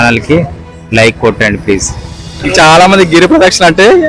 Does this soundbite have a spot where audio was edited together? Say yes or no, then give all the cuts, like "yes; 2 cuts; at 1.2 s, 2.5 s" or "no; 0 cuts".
yes; 1 cut; at 2.4 s